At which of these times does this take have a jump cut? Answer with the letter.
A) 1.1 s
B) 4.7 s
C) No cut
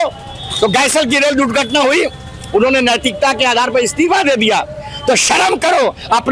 C